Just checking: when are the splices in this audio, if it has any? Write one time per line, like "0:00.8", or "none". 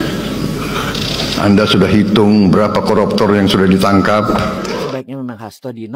0:04.7